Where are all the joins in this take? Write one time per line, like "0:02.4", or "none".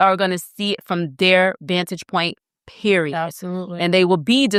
none